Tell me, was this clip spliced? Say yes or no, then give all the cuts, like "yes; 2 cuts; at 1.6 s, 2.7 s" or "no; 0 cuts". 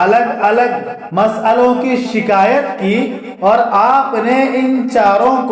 no; 0 cuts